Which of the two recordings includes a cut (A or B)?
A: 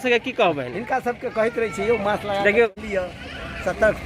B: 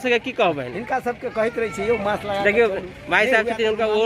A